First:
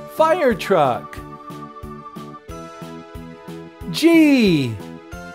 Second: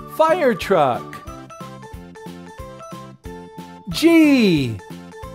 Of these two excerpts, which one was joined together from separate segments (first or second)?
second